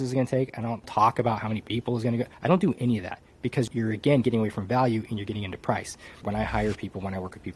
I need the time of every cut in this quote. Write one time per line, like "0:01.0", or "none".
0:06.1